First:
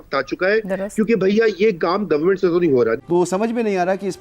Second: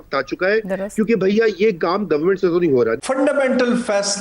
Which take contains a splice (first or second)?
second